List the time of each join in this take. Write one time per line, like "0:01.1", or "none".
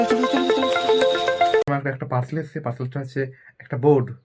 0:01.6

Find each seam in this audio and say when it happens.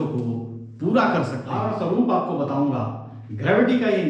0:01.5

